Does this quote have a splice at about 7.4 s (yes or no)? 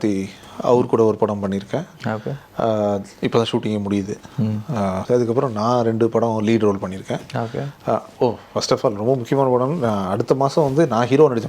no